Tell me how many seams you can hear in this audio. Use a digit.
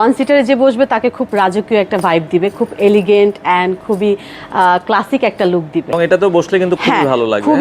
1